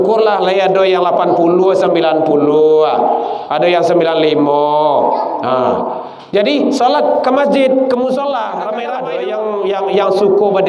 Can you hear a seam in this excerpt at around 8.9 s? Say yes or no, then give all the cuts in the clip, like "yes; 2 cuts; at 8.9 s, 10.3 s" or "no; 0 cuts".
yes; 1 cut; at 8.9 s